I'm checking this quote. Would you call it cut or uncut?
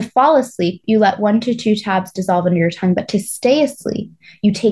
uncut